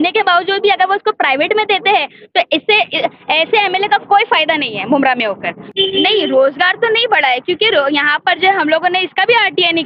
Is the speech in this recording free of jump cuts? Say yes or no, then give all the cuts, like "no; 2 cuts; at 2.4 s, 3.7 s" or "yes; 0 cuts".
yes; 0 cuts